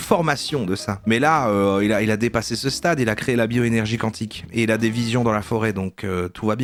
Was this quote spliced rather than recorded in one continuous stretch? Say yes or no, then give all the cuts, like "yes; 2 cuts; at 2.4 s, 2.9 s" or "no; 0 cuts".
no; 0 cuts